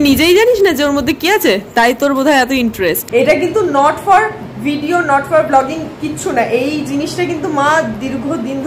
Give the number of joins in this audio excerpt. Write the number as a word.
one